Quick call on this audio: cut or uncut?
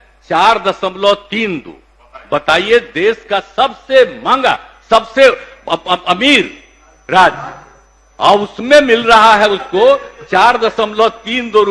uncut